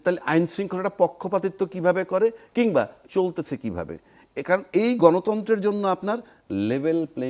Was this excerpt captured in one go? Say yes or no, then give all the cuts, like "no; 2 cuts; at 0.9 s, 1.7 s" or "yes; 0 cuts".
yes; 0 cuts